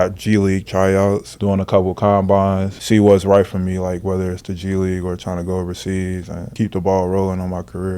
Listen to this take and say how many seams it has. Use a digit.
3